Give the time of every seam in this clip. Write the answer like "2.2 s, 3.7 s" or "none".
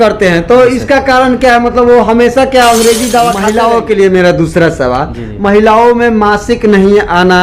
3.4 s